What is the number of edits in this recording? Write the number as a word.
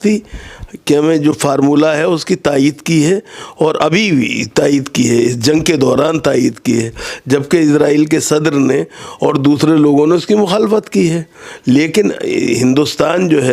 zero